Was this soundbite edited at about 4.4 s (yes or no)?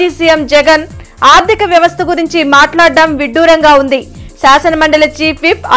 no